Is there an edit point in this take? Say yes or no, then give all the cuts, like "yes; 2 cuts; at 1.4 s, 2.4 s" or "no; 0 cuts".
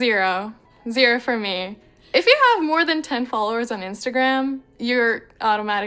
no; 0 cuts